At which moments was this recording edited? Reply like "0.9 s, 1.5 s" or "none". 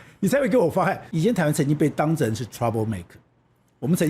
1.1 s